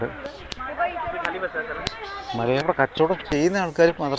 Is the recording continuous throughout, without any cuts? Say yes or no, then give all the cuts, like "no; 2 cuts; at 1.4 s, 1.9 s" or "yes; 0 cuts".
no; 1 cut; at 2.6 s